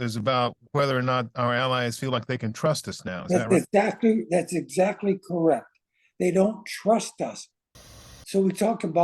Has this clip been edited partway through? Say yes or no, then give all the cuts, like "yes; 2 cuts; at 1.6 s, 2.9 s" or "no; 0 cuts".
yes; 1 cut; at 7.9 s